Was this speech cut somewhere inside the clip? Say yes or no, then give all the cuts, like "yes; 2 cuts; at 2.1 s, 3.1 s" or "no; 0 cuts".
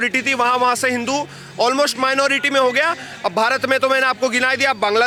no; 0 cuts